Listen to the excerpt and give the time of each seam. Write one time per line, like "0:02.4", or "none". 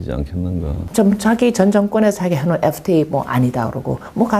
0:02.2